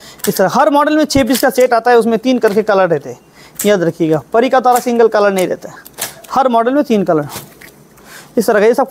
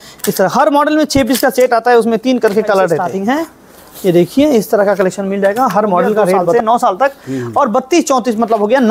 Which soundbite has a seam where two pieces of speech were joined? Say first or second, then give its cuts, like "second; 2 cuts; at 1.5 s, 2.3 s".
second; 2 cuts; at 3.1 s, 6.5 s